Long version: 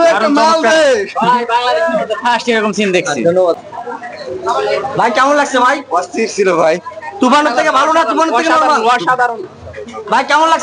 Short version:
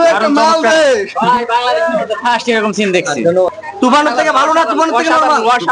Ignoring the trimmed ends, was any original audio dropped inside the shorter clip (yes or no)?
yes